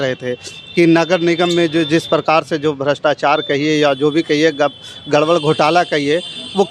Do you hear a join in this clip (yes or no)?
no